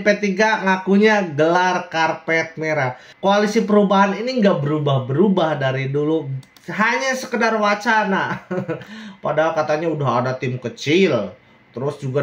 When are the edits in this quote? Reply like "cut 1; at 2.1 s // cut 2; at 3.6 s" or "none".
cut 1; at 3.0 s